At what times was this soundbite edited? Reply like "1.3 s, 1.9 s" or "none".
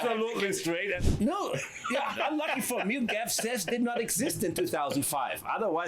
1.0 s